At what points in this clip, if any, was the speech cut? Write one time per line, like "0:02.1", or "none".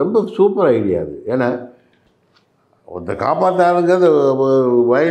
none